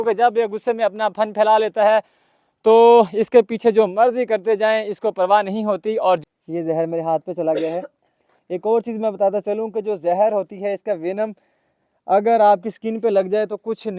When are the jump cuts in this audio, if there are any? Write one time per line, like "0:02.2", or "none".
0:06.2